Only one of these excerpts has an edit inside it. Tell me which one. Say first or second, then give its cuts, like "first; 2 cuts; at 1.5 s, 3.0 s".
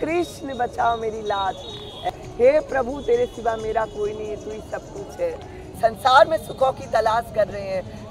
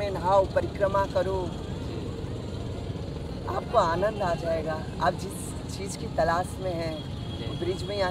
first; 2 cuts; at 2.1 s, 5.7 s